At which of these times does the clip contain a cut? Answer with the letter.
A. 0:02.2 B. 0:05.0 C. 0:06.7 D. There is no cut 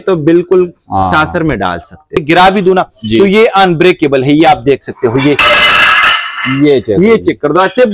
A